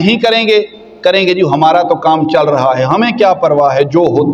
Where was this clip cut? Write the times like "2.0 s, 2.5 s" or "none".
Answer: none